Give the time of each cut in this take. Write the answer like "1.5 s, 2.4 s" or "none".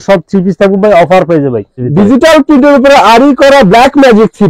1.8 s